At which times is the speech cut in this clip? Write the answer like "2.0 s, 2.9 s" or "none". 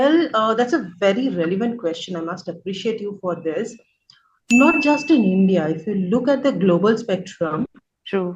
none